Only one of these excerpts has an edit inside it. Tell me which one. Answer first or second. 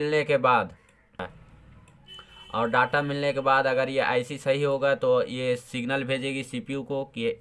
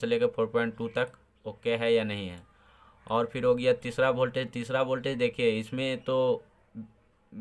first